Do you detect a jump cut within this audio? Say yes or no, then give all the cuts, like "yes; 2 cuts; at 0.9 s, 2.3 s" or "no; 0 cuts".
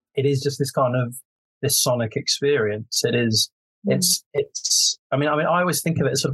no; 0 cuts